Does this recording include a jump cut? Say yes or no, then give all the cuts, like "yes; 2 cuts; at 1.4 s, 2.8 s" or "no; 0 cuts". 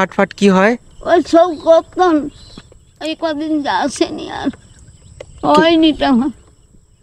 no; 0 cuts